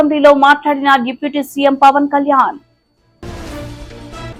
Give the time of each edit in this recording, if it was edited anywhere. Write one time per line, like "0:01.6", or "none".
none

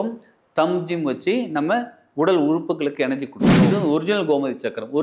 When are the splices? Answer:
0:03.5

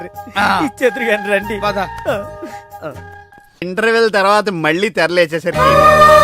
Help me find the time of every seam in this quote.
0:03.6

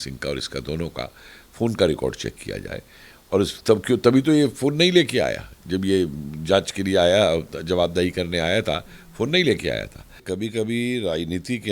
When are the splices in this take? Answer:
0:10.2

